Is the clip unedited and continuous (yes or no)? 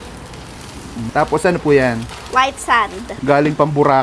no